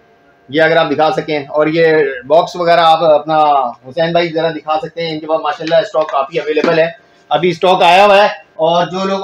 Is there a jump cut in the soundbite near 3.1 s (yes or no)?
no